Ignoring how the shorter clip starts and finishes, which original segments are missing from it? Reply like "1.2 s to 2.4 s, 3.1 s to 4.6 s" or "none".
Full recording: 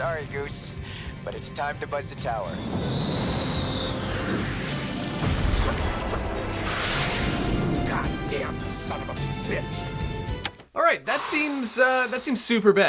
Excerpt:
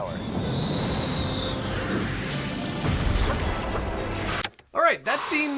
6.8 s to 10.4 s

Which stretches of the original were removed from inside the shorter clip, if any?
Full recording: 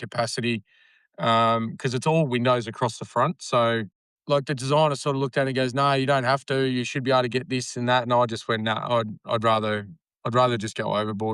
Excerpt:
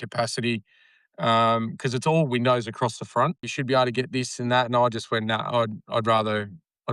3.5 s to 6.8 s

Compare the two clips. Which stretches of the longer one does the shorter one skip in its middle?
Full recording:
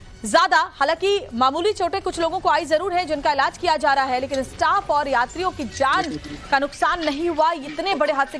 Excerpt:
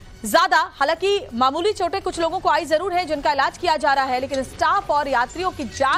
none

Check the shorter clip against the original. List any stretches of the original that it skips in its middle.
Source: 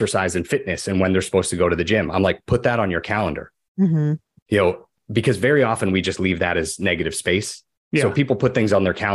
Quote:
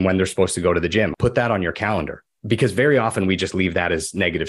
2.1 s to 2.4 s, 3.6 s to 4.9 s

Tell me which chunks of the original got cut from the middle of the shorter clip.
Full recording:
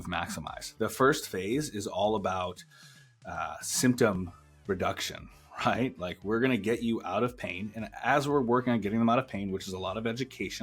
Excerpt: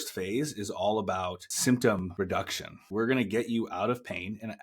2.6 s to 3.6 s, 4.7 s to 5.9 s

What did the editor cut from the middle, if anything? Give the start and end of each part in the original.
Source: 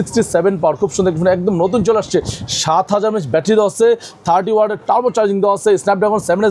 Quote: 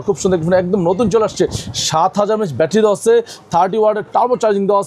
none

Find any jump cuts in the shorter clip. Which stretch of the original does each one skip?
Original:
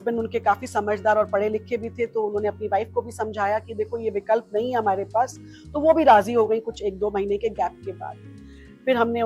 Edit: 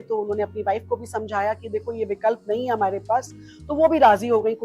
none

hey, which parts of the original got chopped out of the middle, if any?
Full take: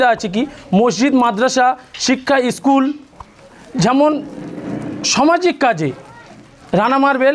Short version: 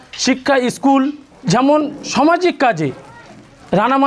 3.1 s to 3.6 s, 4.3 s to 5.0 s

